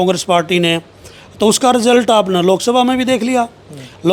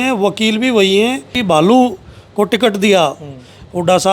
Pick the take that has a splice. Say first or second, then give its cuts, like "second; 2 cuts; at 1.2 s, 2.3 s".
second; 1 cut; at 1.3 s